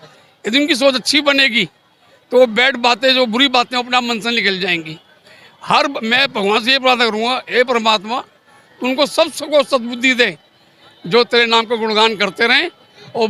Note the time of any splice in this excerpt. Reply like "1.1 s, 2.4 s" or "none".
none